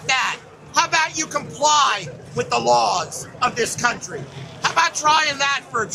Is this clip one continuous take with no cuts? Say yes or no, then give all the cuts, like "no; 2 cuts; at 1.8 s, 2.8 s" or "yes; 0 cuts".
yes; 0 cuts